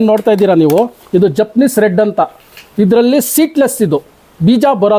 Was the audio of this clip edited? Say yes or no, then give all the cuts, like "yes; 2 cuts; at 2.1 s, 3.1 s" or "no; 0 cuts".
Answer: yes; 1 cut; at 1.0 s